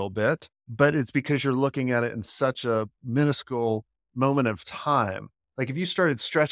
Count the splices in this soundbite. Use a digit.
0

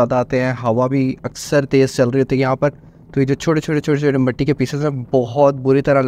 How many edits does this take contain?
0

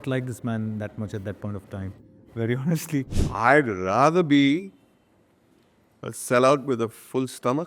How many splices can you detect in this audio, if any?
1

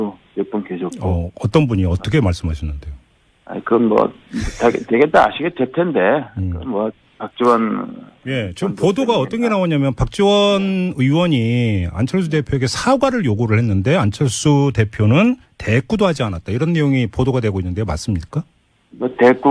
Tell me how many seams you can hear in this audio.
0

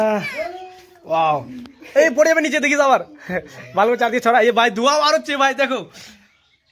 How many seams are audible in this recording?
0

